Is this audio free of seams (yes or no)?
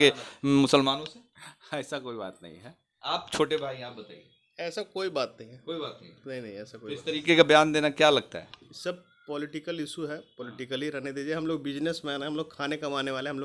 yes